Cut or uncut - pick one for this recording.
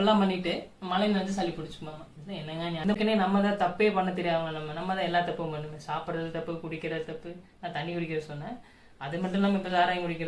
cut